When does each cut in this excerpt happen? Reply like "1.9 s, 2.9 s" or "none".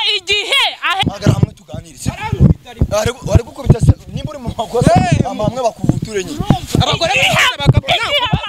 1.0 s